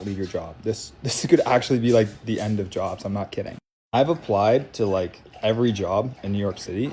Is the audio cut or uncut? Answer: uncut